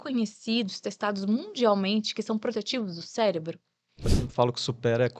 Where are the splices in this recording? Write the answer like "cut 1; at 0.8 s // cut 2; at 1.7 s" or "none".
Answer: cut 1; at 4.2 s